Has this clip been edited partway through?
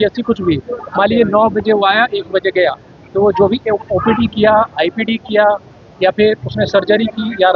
no; 0 cuts

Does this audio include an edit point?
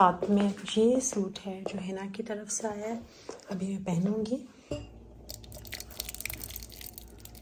yes; 1 cut; at 4.6 s

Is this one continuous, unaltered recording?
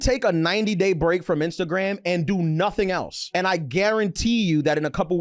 yes; 0 cuts

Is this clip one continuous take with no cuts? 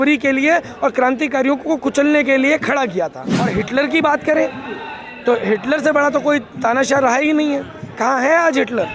no; 1 cut; at 3.4 s

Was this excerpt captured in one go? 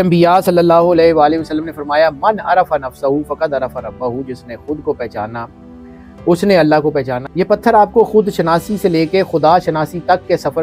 no; 1 cut; at 7.2 s

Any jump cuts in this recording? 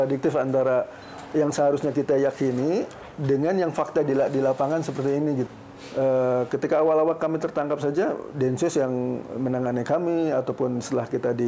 yes; 1 cut; at 5.5 s

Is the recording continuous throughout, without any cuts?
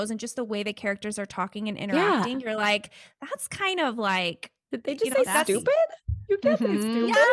yes; 0 cuts

